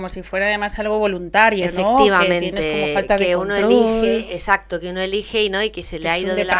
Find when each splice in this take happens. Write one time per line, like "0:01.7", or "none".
none